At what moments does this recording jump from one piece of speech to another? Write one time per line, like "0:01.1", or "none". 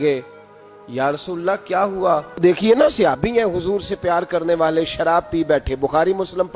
0:02.4